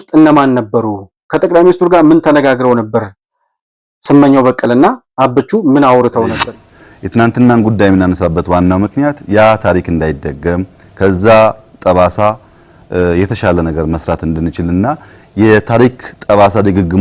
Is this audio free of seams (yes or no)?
no